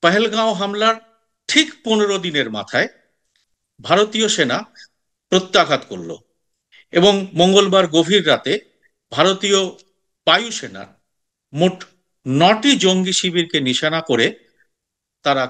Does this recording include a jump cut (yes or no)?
no